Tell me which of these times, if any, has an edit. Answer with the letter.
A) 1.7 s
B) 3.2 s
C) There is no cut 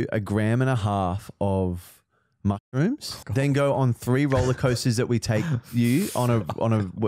B